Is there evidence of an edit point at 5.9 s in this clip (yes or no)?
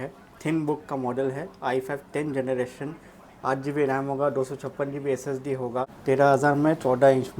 yes